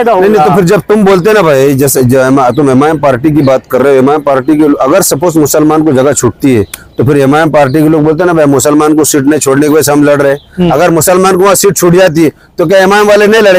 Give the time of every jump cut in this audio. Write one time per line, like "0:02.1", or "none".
none